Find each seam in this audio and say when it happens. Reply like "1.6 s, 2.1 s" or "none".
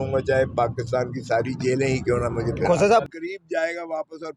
3.0 s